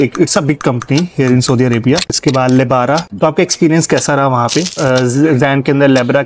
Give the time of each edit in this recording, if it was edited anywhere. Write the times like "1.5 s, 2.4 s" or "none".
2.1 s, 3.1 s, 4.7 s